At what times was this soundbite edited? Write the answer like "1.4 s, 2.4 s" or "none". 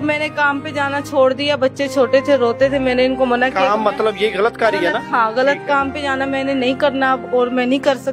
none